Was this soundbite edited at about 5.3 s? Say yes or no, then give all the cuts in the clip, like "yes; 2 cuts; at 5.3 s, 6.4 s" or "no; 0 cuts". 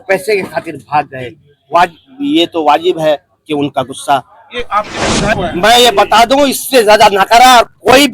yes; 1 cut; at 5.3 s